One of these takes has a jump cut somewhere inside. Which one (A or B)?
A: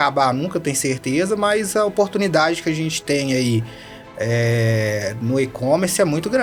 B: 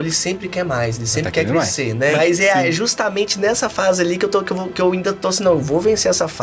B